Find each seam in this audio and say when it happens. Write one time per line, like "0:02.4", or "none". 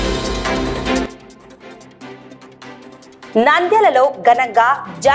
0:01.1
0:02.4
0:03.3